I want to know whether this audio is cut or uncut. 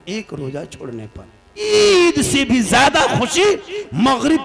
cut